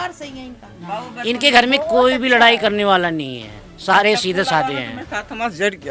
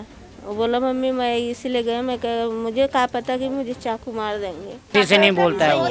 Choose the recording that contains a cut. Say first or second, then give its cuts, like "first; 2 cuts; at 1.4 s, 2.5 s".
second; 1 cut; at 4.9 s